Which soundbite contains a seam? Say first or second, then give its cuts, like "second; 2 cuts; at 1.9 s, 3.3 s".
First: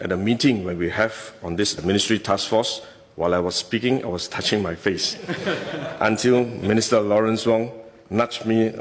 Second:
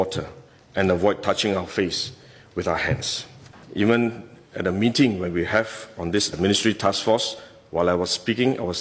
second; 1 cut; at 3.6 s